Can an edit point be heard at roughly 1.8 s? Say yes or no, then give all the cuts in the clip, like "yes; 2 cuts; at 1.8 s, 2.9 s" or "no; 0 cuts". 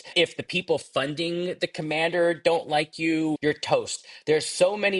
no; 1 cut; at 3.4 s